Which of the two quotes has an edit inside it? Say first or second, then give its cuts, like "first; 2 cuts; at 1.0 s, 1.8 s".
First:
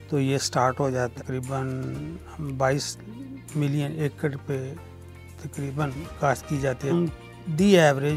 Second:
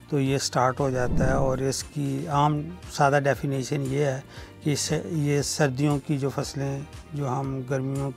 first; 2 cuts; at 1.1 s, 6.9 s